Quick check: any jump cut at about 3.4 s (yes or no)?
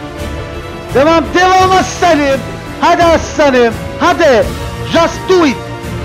no